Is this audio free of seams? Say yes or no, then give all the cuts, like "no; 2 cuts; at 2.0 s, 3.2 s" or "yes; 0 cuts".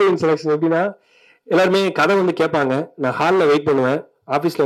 yes; 0 cuts